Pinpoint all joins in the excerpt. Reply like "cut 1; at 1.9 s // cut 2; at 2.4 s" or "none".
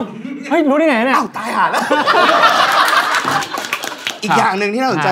cut 1; at 4.2 s